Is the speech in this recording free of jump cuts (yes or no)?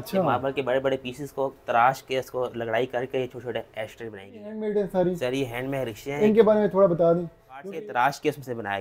no